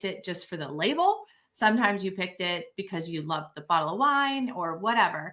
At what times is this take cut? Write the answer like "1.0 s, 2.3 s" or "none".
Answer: none